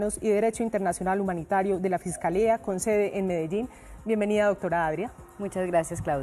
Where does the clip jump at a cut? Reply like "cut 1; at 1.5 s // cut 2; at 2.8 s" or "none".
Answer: cut 1; at 1.7 s